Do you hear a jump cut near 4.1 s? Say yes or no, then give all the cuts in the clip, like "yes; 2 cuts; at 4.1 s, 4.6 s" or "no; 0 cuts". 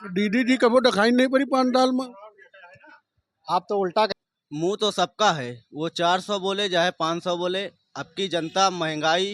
yes; 1 cut; at 4.1 s